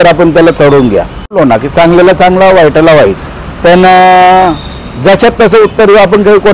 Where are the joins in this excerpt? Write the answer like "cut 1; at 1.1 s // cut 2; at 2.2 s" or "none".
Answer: cut 1; at 1.4 s